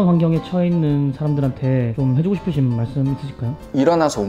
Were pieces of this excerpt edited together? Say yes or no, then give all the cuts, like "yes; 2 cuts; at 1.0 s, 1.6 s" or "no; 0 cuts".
no; 0 cuts